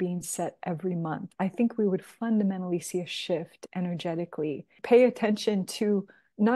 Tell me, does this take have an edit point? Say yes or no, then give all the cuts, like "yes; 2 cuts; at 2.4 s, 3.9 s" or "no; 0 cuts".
yes; 1 cut; at 4.7 s